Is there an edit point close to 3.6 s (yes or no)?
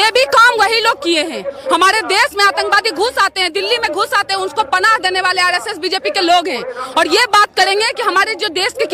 no